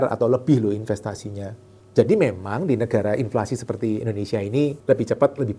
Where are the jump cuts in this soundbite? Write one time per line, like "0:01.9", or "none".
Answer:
none